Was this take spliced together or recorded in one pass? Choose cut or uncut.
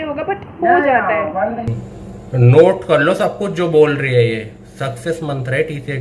cut